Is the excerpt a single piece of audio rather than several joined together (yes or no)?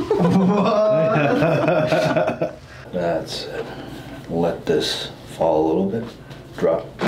no